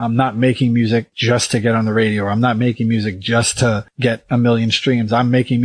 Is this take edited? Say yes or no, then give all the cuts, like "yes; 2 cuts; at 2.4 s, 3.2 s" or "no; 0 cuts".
yes; 2 cuts; at 1.1 s, 3.9 s